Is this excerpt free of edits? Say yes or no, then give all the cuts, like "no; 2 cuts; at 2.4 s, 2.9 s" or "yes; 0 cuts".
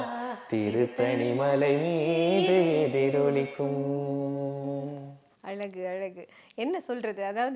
yes; 0 cuts